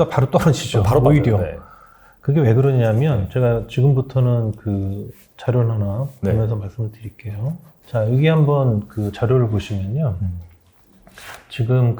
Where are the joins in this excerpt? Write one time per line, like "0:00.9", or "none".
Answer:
none